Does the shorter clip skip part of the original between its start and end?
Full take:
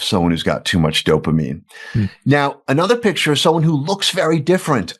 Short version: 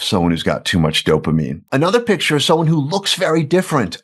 yes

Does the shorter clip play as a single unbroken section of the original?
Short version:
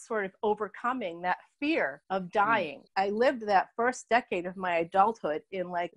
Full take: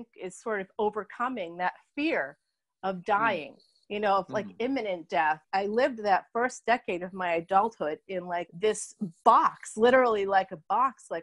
no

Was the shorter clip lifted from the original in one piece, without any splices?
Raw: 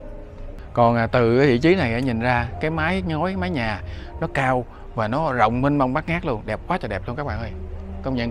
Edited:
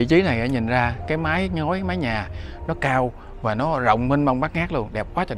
yes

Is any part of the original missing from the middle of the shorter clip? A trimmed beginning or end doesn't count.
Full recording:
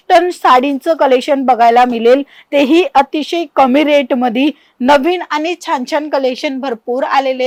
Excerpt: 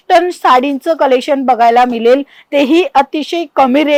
no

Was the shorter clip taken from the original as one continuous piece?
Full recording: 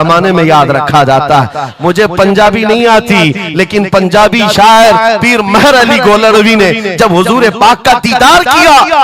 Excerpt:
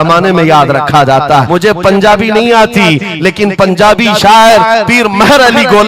no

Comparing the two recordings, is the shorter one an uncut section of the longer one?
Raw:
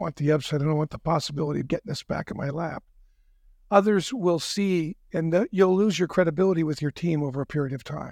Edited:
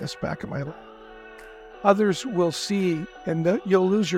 yes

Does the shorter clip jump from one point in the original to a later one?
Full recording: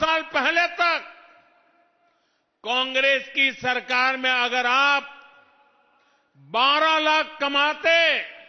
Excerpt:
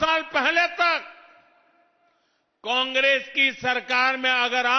no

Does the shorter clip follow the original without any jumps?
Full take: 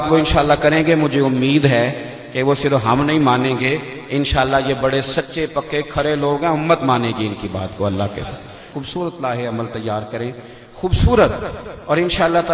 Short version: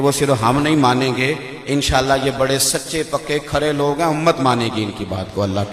yes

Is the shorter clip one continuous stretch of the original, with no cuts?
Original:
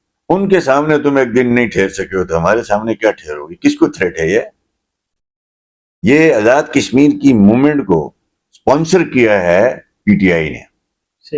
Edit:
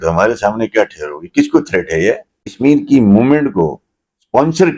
no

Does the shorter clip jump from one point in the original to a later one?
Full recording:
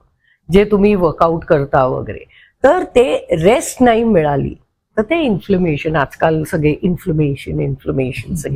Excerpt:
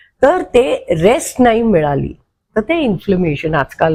no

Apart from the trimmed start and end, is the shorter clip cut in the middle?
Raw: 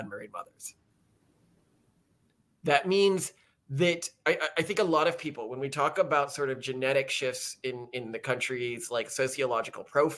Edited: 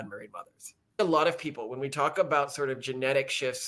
yes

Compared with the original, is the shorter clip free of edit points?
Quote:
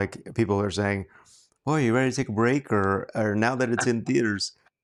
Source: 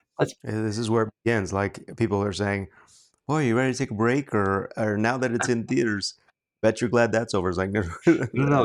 yes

